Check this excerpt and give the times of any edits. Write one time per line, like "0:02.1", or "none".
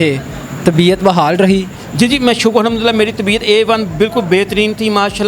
none